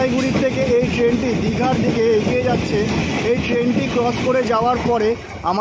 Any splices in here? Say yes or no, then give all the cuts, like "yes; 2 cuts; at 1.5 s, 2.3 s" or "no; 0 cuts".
no; 0 cuts